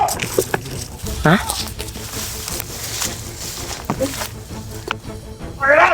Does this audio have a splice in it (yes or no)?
no